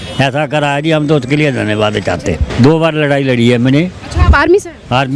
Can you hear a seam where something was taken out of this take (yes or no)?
yes